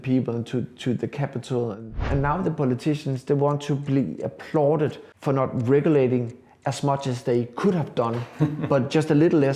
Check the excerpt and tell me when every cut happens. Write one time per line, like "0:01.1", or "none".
0:02.1
0:05.1